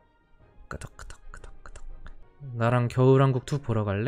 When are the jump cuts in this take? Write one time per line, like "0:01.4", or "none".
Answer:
0:02.2